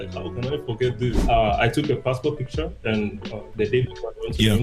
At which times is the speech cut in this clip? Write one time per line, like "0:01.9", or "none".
0:01.2
0:03.5